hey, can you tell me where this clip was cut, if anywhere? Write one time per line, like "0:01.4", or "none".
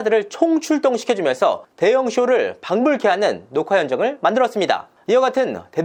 none